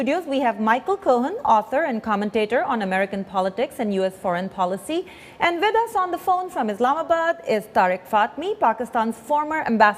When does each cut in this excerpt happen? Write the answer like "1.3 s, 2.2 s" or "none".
3.3 s